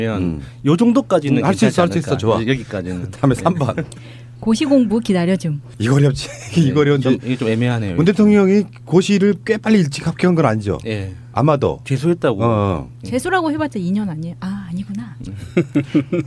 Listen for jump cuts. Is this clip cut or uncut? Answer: cut